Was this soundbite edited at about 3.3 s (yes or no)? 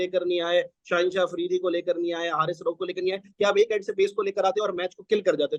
no